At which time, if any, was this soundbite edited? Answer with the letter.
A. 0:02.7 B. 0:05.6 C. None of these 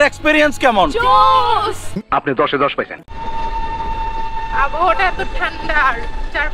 C